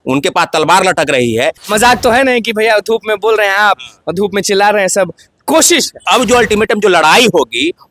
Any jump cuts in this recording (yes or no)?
yes